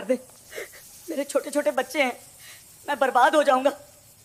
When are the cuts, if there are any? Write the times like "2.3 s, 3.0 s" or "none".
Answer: none

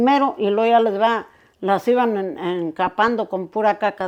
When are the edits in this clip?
none

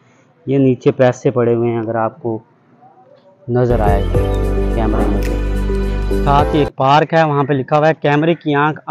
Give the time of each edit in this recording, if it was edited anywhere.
none

